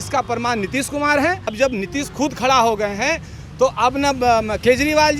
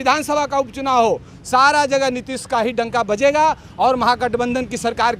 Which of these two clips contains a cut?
first; 1 cut; at 1.5 s

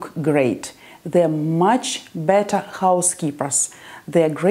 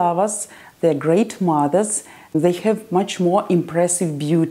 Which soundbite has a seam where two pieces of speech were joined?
second; 1 cut; at 2.3 s

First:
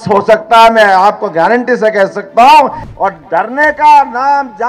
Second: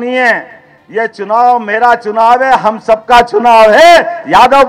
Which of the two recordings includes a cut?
first; 1 cut; at 2.8 s

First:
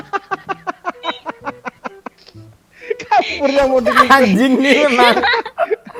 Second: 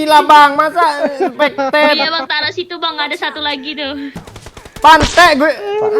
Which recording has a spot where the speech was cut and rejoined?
second; 1 cut; at 4.3 s

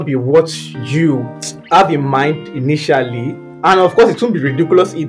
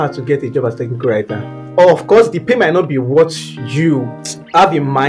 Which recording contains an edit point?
first; 1 cut; at 3.6 s

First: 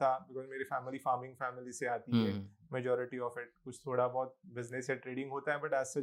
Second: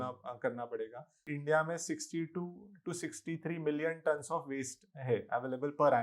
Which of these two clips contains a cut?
second; 1 cut; at 1.2 s

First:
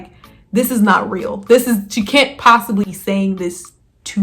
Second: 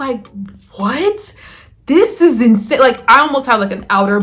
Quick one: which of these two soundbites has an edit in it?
first; 1 cut; at 2.9 s

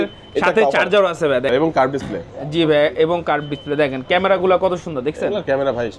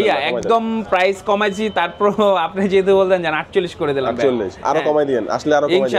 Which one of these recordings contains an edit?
first; 1 cut; at 1.5 s

